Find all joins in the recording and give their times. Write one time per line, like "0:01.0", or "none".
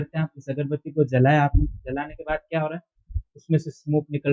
none